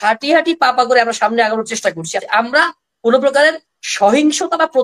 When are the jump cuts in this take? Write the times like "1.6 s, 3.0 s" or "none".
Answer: 2.2 s